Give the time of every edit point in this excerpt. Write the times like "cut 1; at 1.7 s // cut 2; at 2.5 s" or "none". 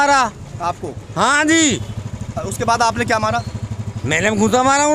none

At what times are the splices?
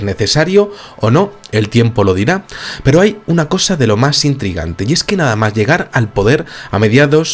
cut 1; at 2.4 s

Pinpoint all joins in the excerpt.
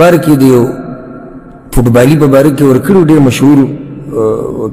none

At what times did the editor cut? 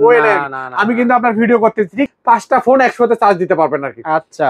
cut 1; at 2.1 s

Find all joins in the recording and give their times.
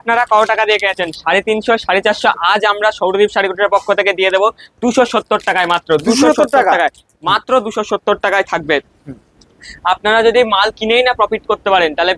none

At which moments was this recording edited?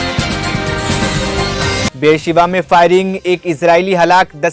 none

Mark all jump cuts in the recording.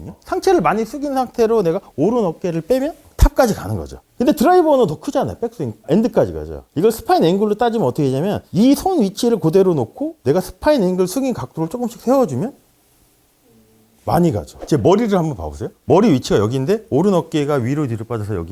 cut 1; at 14.6 s

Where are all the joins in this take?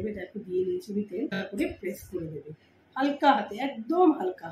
cut 1; at 1.4 s

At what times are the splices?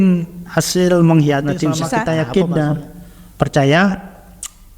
cut 1; at 1.9 s

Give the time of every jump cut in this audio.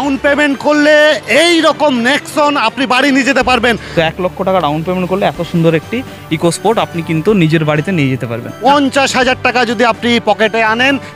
cut 1; at 3.8 s // cut 2; at 8.5 s

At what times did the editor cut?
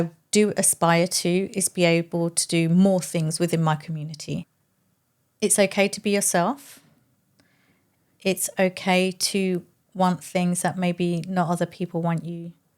cut 1; at 4.5 s

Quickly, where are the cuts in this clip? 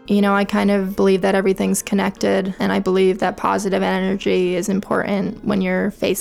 cut 1; at 0.9 s // cut 2; at 2.6 s

